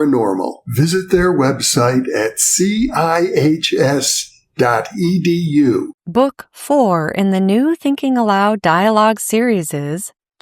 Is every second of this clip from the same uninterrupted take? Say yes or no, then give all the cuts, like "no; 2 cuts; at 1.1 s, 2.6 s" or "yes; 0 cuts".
no; 1 cut; at 6.0 s